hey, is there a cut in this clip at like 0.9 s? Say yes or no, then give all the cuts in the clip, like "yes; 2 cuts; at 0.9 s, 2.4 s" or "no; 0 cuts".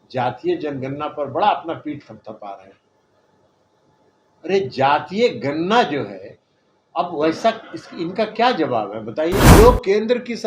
no; 1 cut; at 9.5 s